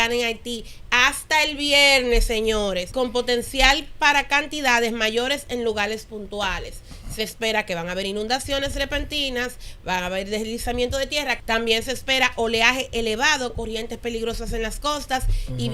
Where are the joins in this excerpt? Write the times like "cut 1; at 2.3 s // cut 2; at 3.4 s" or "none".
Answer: cut 1; at 2.9 s // cut 2; at 11.4 s